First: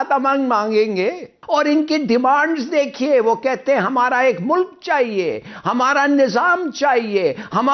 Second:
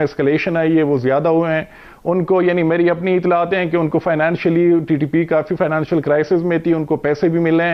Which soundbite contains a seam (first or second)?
first